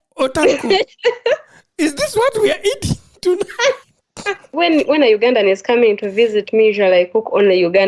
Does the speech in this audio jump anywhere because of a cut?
yes; 1 cut; at 4.5 s

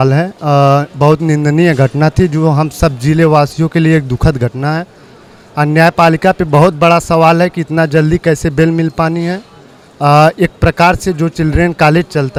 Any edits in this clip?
no; 0 cuts

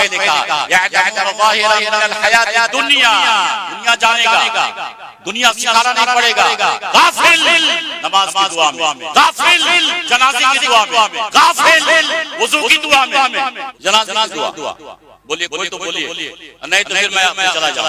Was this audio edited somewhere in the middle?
yes; 1 cut; at 13.7 s

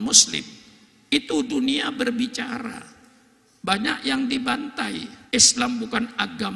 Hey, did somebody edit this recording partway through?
yes; 1 cut; at 5.1 s

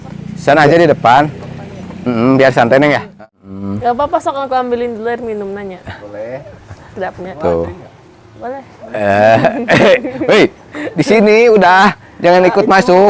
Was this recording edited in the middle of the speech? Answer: yes; 1 cut; at 3.1 s

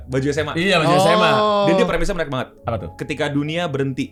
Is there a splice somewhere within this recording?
no; 0 cuts

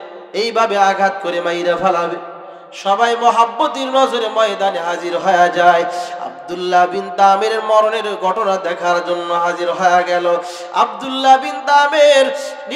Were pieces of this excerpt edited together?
no; 0 cuts

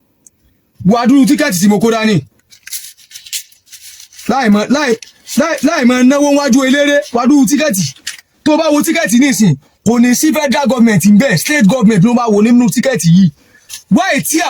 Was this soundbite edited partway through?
no; 0 cuts

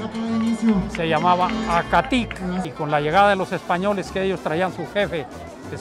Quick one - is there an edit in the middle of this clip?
yes; 1 cut; at 2.7 s

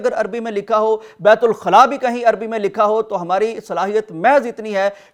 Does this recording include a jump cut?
no; 0 cuts

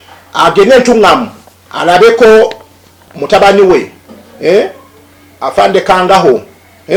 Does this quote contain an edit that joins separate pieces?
no; 0 cuts

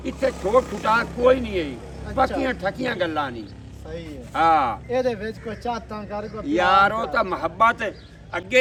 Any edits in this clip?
no; 0 cuts

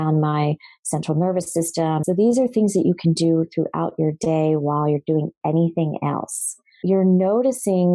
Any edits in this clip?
yes; 2 cuts; at 2.0 s, 6.8 s

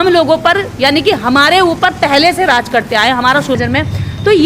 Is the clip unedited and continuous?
no; 1 cut; at 3.6 s

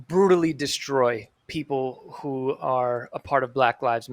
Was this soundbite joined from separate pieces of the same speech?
yes; 1 cut; at 1.4 s

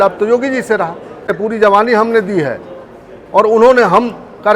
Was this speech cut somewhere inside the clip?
yes; 1 cut; at 1.5 s

